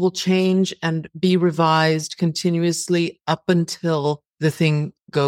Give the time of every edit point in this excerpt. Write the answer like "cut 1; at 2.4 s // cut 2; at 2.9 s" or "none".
cut 1; at 4.3 s